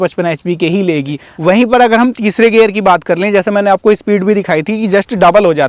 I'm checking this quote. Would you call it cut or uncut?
cut